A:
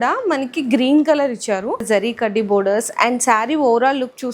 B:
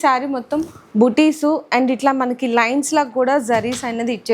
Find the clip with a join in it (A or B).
A